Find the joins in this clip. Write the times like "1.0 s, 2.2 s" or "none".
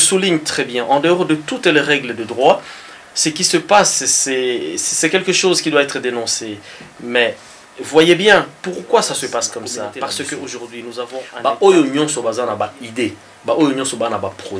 11.3 s